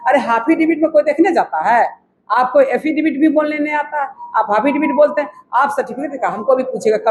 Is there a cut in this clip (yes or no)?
no